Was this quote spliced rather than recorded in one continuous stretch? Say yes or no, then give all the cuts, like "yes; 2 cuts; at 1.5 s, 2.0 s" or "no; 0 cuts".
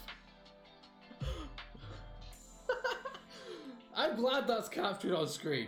no; 0 cuts